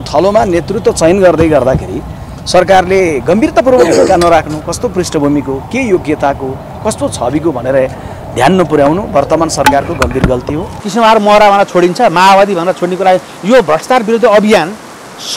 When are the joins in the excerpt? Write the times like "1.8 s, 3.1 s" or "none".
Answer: 10.7 s